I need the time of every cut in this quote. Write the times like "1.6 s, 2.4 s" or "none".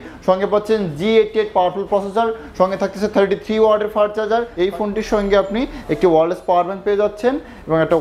4.5 s